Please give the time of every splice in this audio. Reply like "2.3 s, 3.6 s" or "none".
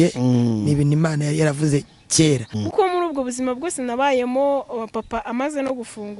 2.5 s